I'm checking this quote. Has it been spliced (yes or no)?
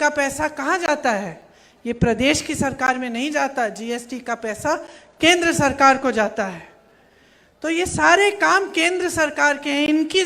no